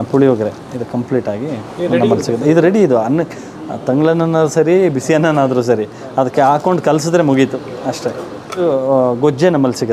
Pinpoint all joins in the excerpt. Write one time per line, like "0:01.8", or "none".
none